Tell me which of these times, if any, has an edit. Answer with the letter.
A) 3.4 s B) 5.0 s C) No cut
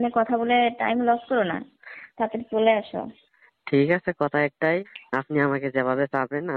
B